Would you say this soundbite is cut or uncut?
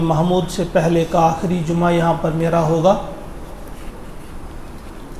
uncut